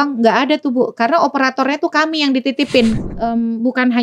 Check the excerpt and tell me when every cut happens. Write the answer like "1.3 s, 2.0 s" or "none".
3.0 s